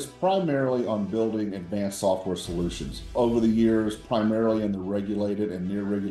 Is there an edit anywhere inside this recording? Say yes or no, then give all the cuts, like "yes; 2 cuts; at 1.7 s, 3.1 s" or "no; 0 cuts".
yes; 1 cut; at 3.1 s